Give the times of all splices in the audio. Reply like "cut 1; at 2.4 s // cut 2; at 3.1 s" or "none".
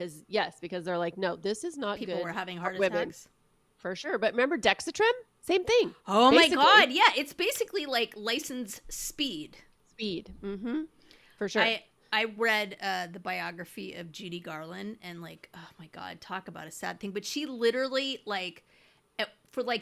none